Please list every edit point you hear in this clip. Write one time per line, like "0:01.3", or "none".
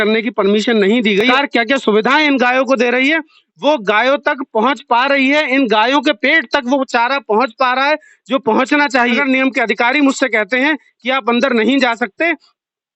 0:01.3
0:09.2

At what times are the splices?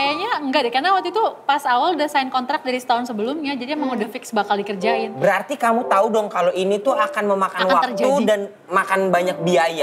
none

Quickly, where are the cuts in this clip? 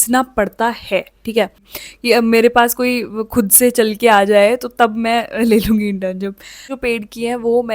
0:01.6
0:06.6

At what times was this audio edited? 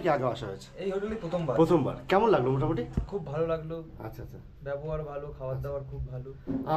none

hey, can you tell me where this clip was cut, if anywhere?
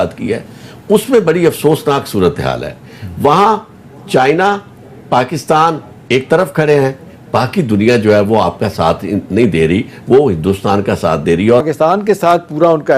0:11.6

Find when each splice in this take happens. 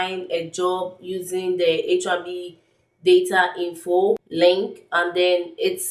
0:04.3

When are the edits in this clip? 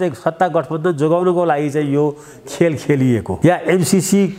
0:03.3

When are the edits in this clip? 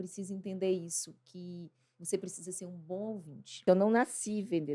0:03.6

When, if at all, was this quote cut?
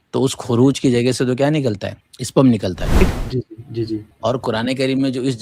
0:03.0

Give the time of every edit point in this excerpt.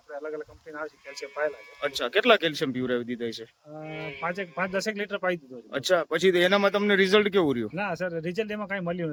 none

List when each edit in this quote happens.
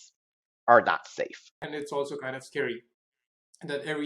0:01.7

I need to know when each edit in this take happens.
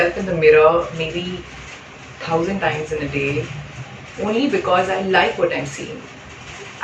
none

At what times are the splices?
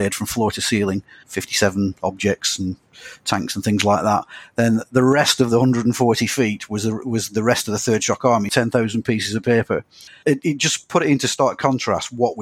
0:01.3
0:08.5
0:10.2

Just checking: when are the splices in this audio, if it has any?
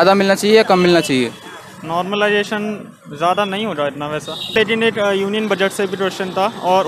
0:04.5

